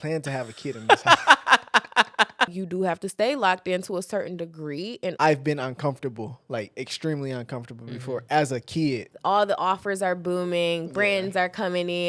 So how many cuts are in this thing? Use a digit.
3